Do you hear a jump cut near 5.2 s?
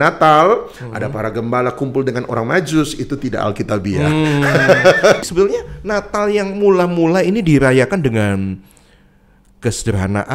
yes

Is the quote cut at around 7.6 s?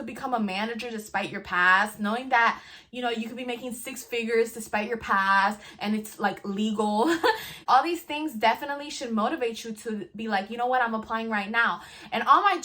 yes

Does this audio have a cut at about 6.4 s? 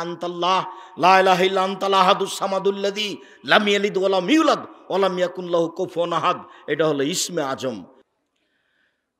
no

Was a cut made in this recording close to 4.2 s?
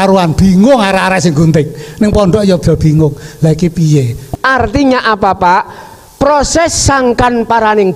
yes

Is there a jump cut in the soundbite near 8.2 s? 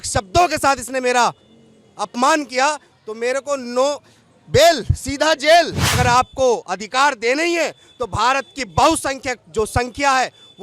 no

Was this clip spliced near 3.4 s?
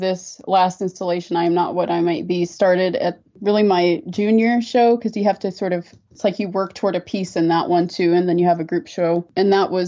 no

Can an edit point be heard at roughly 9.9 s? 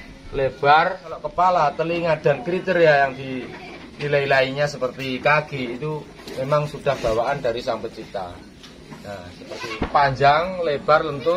yes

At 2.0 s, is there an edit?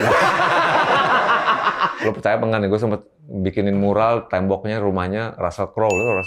yes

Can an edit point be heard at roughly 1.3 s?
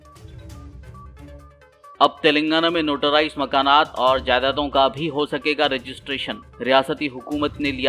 yes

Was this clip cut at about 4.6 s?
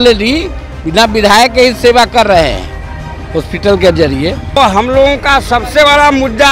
yes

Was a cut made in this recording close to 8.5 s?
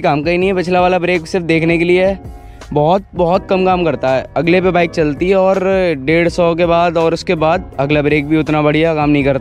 no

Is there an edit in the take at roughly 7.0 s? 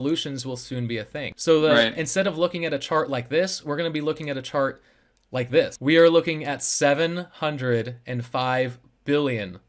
no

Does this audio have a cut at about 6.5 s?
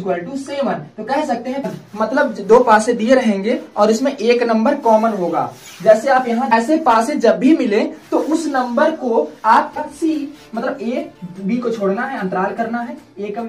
yes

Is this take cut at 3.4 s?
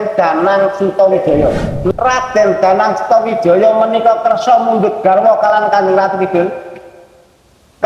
no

